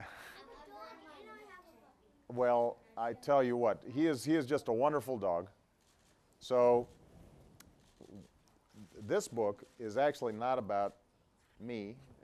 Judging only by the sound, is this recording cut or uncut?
uncut